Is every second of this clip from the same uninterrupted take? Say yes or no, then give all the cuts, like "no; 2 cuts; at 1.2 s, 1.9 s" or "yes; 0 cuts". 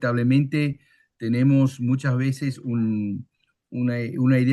yes; 0 cuts